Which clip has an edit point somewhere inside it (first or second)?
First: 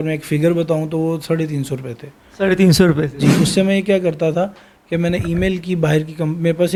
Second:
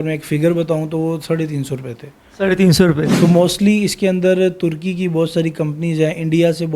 second